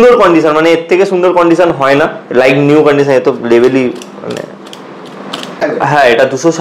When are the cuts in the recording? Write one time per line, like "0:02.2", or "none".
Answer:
0:05.6